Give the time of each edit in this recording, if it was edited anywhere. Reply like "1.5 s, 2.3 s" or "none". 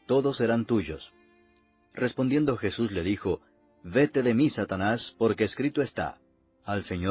none